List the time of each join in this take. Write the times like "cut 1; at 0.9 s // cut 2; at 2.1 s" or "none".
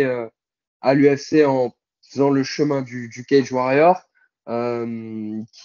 none